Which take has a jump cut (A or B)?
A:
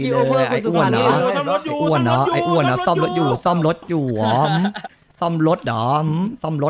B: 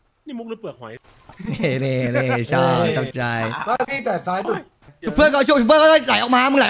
B